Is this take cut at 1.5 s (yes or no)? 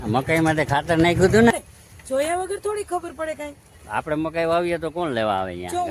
yes